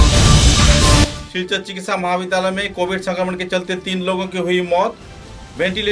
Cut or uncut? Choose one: cut